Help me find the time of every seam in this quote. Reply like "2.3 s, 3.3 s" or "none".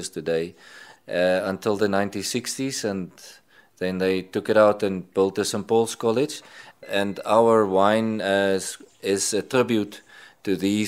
6.7 s

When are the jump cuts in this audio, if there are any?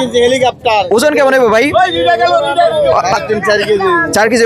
none

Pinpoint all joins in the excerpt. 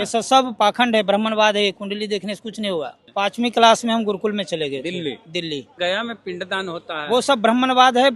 3.0 s, 5.7 s

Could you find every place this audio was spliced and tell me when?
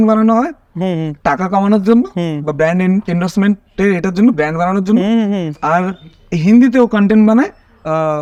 none

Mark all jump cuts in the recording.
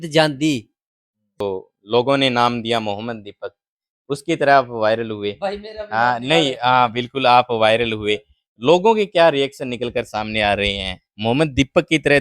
1.4 s

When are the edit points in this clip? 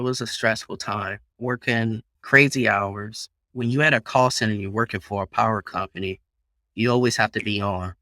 1.2 s, 2.1 s, 3.4 s

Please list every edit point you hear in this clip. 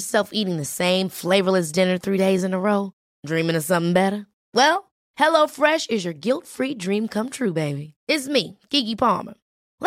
none

